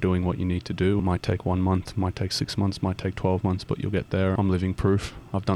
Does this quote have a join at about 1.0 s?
yes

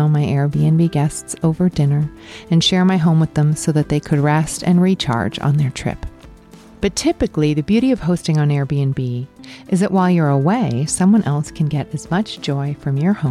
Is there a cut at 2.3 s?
no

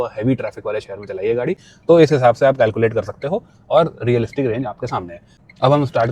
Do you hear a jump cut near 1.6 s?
no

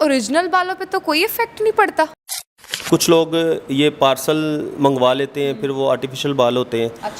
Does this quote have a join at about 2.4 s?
yes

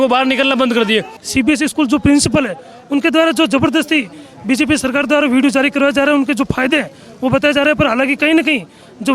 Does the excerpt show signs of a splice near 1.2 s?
yes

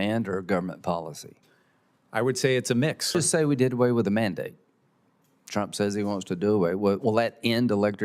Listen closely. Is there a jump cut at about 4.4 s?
no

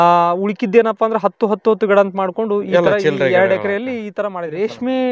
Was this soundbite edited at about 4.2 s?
yes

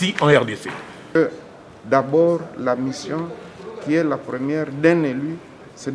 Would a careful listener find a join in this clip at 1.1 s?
yes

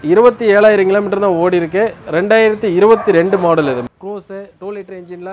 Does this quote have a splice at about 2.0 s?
yes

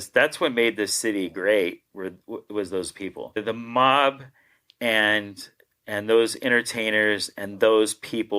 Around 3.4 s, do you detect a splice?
yes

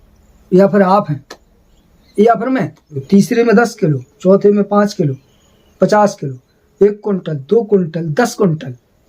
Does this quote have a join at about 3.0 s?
yes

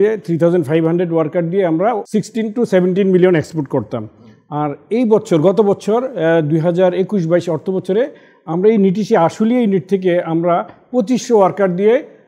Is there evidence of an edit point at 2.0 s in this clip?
yes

